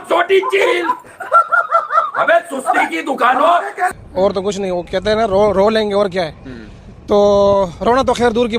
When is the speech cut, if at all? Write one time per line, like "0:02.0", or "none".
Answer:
0:03.9